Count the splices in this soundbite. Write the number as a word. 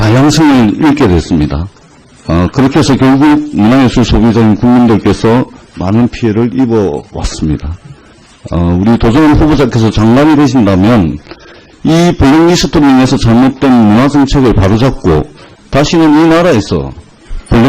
one